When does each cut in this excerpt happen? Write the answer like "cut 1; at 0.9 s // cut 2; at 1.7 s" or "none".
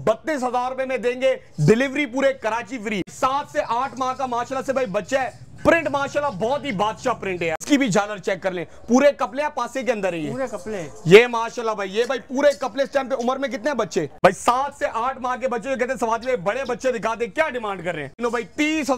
cut 1; at 3.1 s // cut 2; at 7.6 s // cut 3; at 14.1 s // cut 4; at 18.2 s